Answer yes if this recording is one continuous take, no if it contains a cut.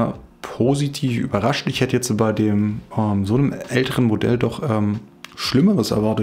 yes